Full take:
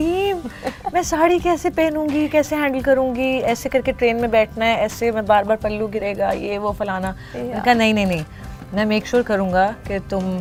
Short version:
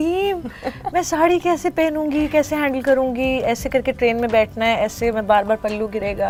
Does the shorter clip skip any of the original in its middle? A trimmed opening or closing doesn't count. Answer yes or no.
no